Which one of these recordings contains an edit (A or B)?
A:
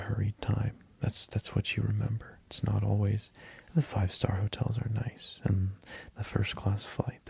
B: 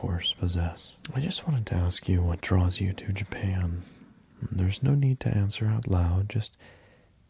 B